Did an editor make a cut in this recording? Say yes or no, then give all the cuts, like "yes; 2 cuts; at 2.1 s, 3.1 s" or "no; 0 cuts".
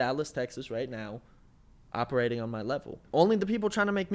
yes; 1 cut; at 3.0 s